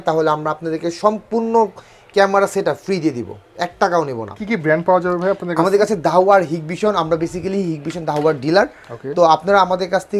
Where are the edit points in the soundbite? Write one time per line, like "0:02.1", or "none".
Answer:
none